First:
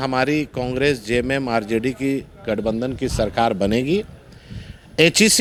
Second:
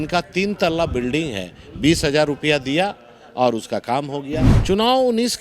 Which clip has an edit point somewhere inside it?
second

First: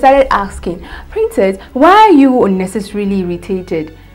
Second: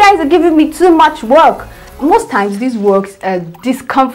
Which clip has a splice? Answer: second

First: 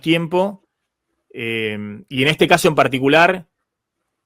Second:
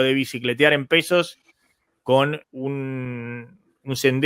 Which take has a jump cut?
second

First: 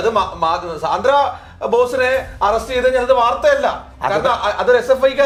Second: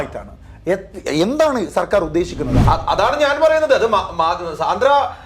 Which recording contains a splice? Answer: second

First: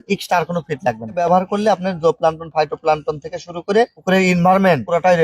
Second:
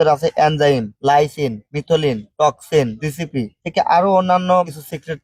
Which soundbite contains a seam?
first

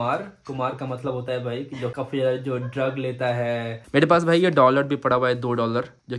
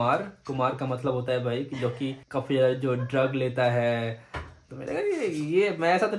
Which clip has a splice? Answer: first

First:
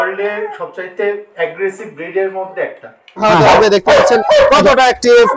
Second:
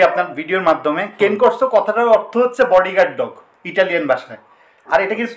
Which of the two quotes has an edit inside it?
first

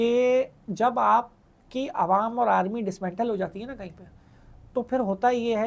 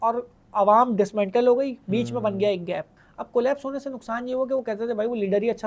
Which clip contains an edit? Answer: second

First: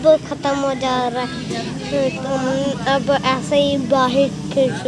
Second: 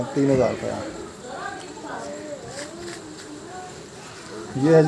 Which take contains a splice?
first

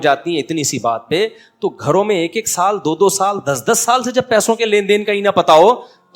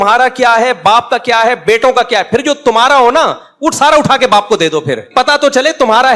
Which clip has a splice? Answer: second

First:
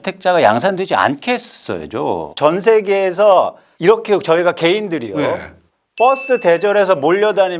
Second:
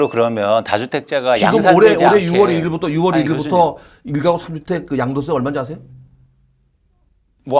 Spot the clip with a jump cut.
first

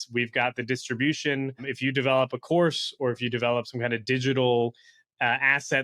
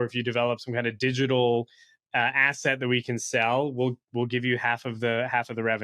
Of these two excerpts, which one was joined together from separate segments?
first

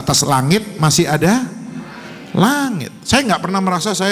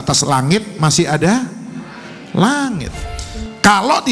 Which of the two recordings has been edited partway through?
second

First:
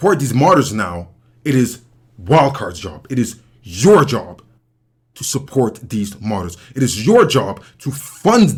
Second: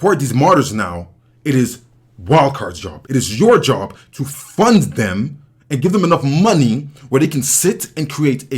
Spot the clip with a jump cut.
second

